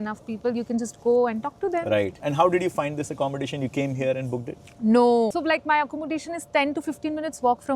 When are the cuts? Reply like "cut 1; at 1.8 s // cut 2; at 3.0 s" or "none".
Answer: cut 1; at 2.2 s // cut 2; at 5.4 s